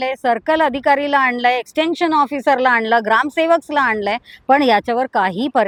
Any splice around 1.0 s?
no; 0 cuts

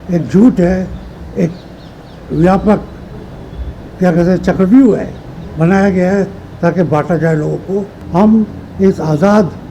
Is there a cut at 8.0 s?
yes; 1 cut; at 8.0 s

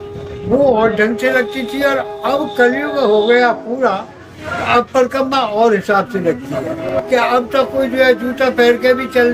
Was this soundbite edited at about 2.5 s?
no; 1 cut; at 6.8 s

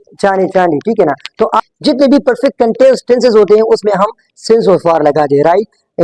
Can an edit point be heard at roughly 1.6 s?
yes; 1 cut; at 1.6 s

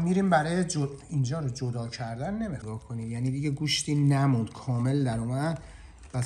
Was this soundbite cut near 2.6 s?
yes; 1 cut; at 2.6 s

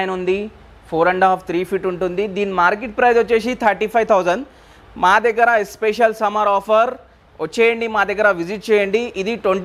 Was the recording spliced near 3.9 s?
no; 0 cuts

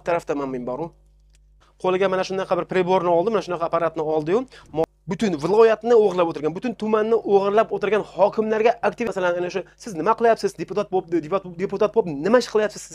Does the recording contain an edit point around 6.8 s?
no; 3 cuts; at 1.6 s, 4.8 s, 9.1 s

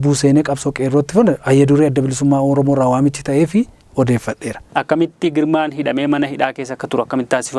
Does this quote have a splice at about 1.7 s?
no; 1 cut; at 4.6 s

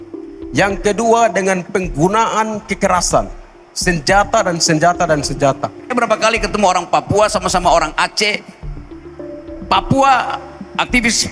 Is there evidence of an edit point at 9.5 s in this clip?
no; 1 cut; at 5.9 s

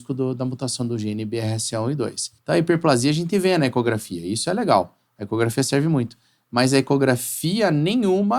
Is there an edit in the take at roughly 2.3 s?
yes; 1 cut; at 2.3 s

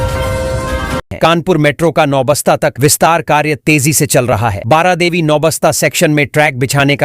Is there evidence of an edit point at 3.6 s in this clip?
no; 1 cut; at 1.0 s

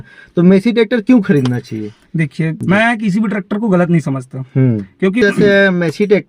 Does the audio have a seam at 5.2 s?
yes; 2 cuts; at 2.6 s, 5.2 s

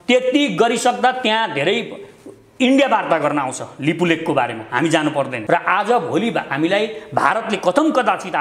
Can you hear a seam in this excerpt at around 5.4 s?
yes; 1 cut; at 5.4 s

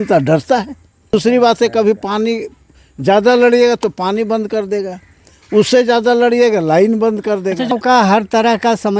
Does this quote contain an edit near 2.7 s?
no; 2 cuts; at 1.1 s, 7.7 s

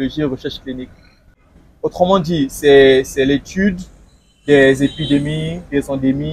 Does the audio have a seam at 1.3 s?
yes; 1 cut; at 1.3 s

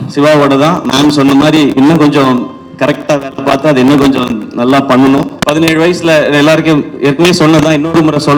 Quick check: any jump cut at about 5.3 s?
yes; 1 cut; at 5.3 s

